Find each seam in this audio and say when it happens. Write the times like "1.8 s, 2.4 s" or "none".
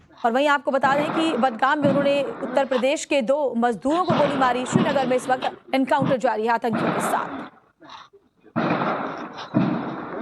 2.4 s

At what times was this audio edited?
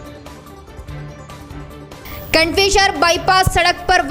0.9 s, 1.9 s

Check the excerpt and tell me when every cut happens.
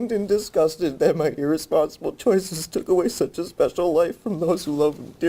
none

